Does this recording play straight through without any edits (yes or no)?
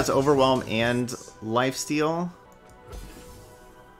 no